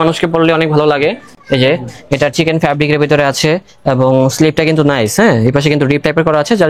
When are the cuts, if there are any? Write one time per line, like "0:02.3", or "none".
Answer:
none